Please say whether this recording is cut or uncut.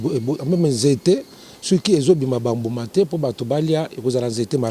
uncut